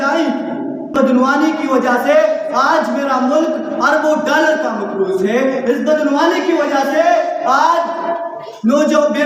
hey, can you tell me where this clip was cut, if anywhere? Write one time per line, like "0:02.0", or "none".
0:00.9